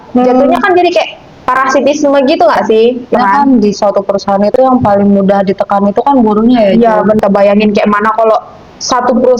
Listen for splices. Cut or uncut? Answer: cut